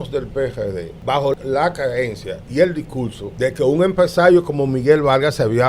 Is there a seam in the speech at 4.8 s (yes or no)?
no